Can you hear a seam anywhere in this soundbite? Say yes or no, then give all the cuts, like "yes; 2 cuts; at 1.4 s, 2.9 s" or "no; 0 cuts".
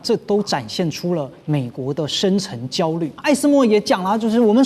yes; 1 cut; at 3.2 s